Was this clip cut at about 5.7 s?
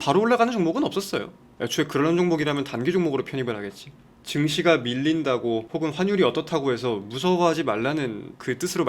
yes; 1 cut; at 5.7 s

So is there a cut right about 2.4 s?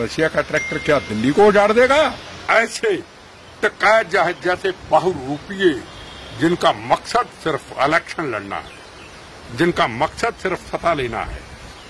yes; 1 cut; at 2.4 s

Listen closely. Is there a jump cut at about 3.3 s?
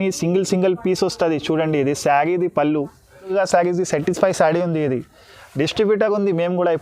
yes; 1 cut; at 3.3 s

